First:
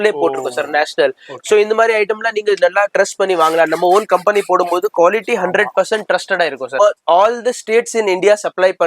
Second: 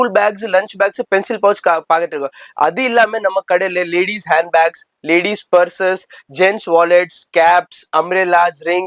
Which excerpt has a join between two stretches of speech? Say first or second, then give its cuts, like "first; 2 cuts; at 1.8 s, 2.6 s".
first; 1 cut; at 6.8 s